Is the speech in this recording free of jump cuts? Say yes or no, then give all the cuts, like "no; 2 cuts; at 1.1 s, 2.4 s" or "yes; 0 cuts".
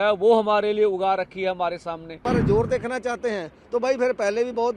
no; 1 cut; at 2.2 s